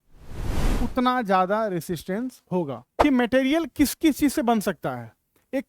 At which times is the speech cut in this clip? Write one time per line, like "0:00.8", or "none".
0:02.8

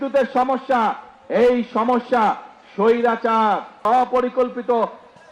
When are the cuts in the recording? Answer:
0:03.8

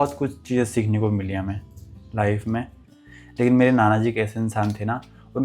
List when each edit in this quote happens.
0:03.0

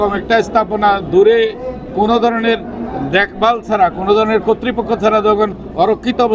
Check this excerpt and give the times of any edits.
none

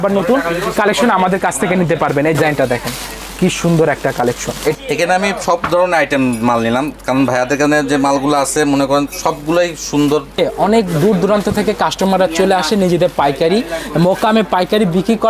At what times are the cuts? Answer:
0:02.4
0:04.7
0:10.4

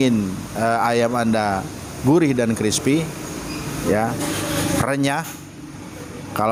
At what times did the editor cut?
none

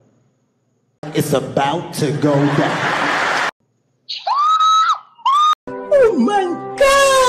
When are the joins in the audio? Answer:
none

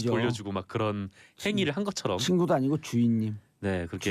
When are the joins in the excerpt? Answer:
0:02.0

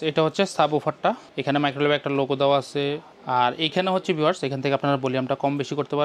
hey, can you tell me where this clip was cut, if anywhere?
0:01.3
0:03.1

